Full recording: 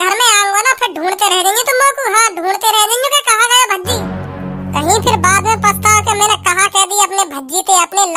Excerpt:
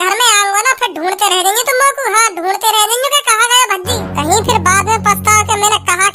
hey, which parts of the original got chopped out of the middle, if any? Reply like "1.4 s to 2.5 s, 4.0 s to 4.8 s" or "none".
4.1 s to 4.7 s